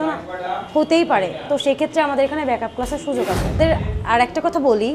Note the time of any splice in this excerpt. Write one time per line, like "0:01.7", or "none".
0:03.6